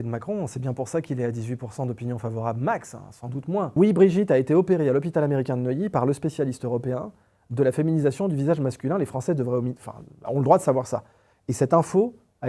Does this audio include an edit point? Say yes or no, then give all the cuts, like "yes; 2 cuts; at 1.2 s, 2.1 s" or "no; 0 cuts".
yes; 1 cut; at 3.7 s